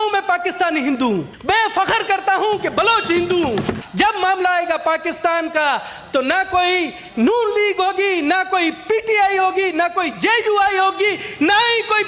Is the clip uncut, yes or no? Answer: no